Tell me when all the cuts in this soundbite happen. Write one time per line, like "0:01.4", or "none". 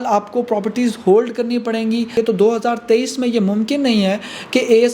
0:02.1